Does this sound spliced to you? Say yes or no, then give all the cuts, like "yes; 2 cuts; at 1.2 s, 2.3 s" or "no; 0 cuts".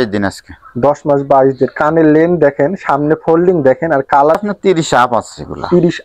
yes; 1 cut; at 4.4 s